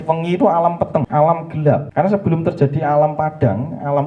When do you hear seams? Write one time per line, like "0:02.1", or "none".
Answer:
0:01.1
0:01.9